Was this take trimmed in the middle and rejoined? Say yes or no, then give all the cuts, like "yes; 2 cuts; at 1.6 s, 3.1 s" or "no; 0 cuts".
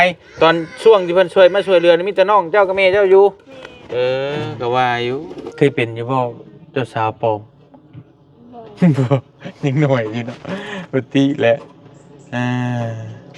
yes; 1 cut; at 5.4 s